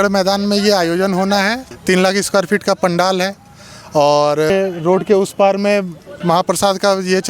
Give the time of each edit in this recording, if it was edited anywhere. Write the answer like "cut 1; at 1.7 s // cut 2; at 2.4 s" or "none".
cut 1; at 1.7 s // cut 2; at 4.5 s